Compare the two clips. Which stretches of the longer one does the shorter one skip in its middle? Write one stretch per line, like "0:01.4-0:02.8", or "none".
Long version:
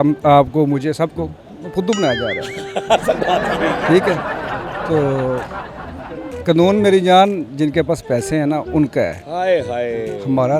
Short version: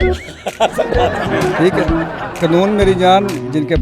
0:04.6-0:06.3